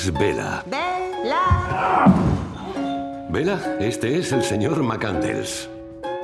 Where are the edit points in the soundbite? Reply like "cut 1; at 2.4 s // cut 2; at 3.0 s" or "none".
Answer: none